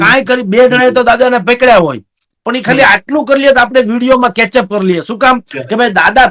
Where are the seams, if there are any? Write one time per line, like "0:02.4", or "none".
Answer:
none